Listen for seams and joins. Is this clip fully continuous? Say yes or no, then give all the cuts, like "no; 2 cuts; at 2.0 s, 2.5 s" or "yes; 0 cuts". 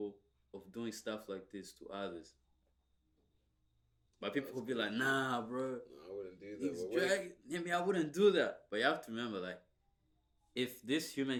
yes; 0 cuts